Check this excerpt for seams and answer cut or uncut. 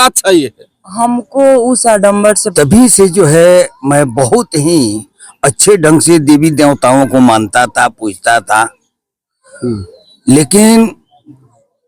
cut